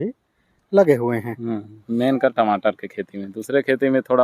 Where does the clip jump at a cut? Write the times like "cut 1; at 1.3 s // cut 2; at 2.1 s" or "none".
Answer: cut 1; at 1.7 s